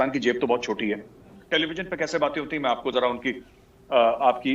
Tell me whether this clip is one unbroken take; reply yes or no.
no